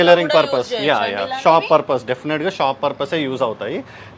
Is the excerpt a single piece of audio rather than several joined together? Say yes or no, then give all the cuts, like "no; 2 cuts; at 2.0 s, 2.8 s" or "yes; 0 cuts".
yes; 0 cuts